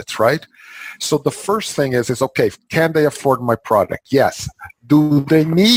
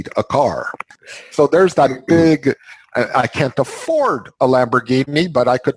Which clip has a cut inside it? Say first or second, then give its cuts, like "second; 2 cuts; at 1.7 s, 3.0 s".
second; 1 cut; at 0.9 s